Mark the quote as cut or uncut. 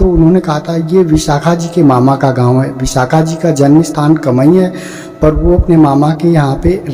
uncut